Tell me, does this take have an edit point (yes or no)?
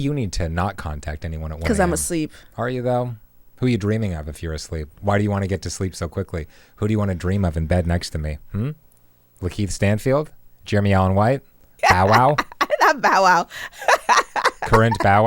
yes